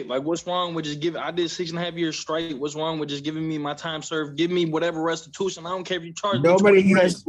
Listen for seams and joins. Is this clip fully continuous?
yes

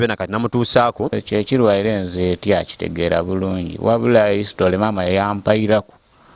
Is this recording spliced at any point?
yes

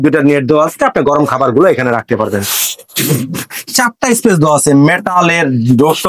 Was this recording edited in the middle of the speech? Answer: no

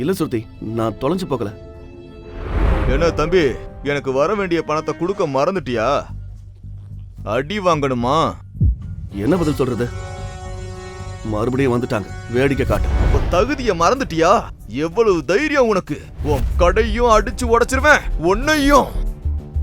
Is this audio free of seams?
no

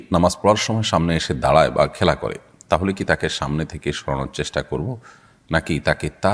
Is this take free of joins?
yes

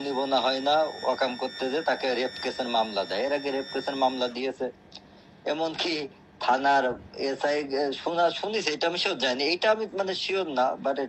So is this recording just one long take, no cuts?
yes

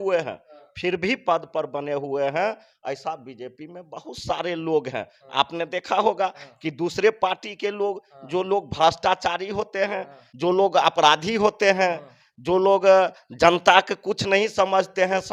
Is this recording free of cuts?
yes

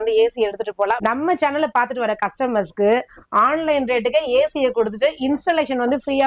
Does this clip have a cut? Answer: yes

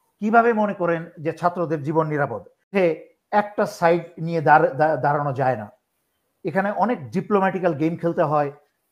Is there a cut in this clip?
yes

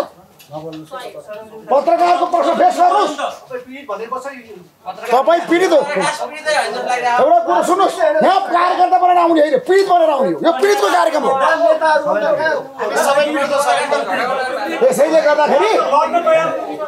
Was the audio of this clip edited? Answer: no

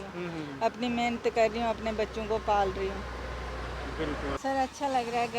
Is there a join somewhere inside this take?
yes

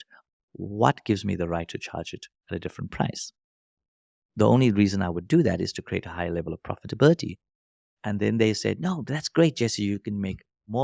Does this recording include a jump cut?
no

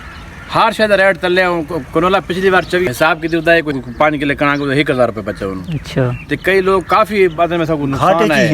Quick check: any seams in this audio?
yes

